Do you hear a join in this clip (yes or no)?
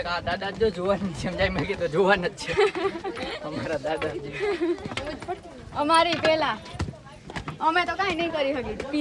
no